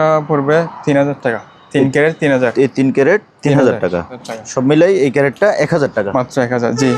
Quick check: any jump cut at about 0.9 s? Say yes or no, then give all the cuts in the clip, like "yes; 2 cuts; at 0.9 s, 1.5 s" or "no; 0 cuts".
no; 1 cut; at 4.2 s